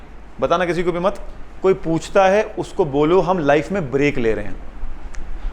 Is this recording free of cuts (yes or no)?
yes